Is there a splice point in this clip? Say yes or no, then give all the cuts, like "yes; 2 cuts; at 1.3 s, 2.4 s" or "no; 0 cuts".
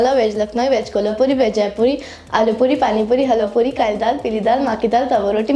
no; 0 cuts